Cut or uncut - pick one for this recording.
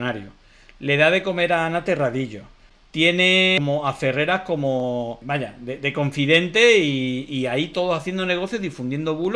cut